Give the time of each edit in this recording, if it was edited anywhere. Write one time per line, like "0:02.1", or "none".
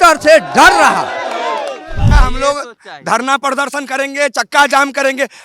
0:02.1